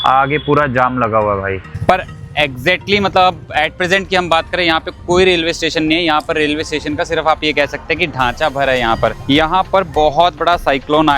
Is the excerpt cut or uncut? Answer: cut